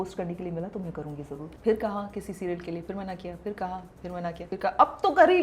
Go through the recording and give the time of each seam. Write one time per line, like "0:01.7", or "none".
0:01.4
0:04.5